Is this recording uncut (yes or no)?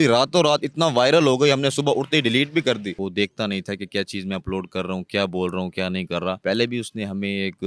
no